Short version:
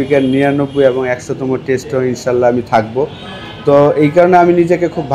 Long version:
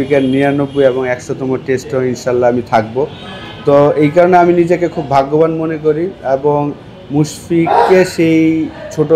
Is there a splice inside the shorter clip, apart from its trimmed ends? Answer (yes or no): no